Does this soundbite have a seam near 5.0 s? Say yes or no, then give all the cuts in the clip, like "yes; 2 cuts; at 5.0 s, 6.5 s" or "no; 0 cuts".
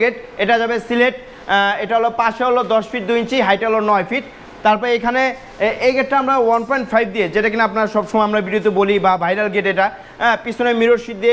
no; 0 cuts